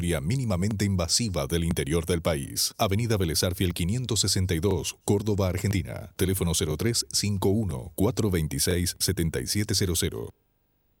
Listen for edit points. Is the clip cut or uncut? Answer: uncut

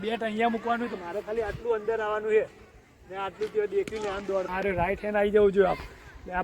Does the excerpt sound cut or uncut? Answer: cut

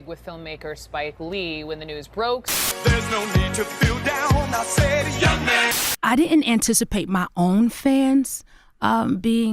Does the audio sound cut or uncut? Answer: cut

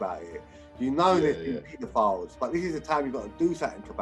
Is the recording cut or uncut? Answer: uncut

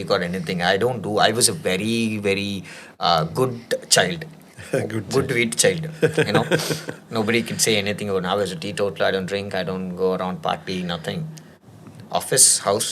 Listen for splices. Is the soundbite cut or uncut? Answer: uncut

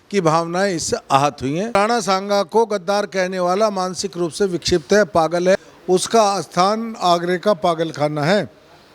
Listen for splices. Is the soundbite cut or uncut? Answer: cut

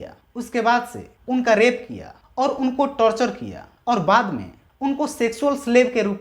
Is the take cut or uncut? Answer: uncut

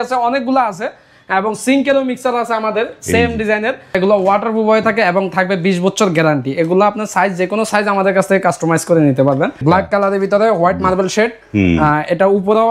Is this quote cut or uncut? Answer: cut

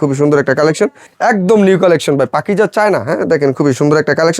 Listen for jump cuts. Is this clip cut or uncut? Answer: cut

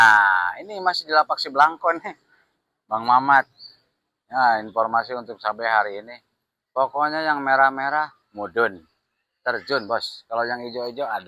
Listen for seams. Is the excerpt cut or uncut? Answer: uncut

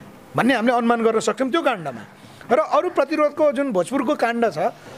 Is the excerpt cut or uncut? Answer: uncut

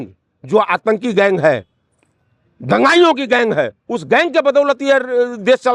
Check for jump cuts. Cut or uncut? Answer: uncut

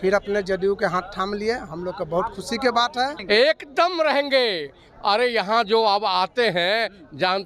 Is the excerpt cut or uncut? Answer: cut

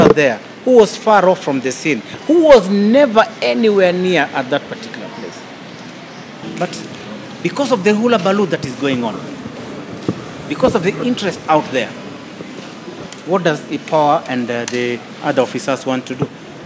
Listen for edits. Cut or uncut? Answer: cut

